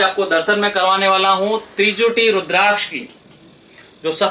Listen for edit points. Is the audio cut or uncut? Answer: uncut